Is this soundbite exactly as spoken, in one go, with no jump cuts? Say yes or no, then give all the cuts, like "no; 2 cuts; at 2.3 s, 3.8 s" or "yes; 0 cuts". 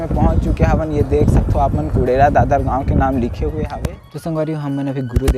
no; 1 cut; at 3.7 s